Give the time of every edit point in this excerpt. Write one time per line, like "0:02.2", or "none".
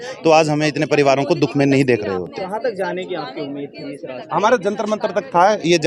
none